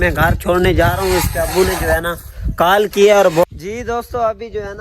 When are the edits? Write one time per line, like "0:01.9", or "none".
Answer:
0:03.4